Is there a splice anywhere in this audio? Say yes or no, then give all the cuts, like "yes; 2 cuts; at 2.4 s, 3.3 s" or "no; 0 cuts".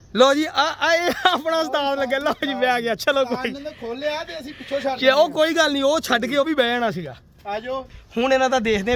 yes; 1 cut; at 7.9 s